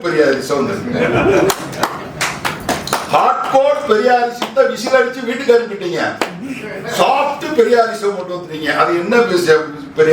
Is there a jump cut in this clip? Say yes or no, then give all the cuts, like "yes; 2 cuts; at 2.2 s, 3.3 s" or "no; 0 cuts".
no; 0 cuts